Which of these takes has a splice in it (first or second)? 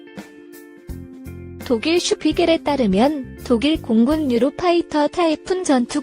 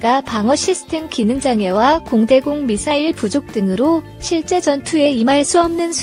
first